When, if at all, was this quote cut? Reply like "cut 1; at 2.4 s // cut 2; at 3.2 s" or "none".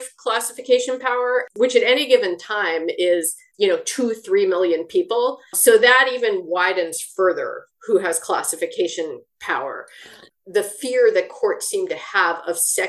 cut 1; at 1.5 s // cut 2; at 3.4 s // cut 3; at 5.5 s // cut 4; at 10.2 s